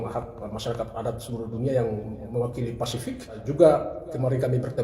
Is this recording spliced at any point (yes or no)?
yes